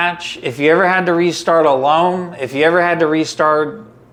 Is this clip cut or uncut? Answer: uncut